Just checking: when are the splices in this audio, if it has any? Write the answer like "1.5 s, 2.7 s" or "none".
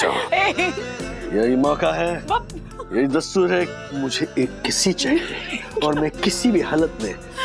none